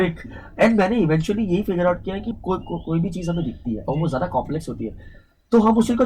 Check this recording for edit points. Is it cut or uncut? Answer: cut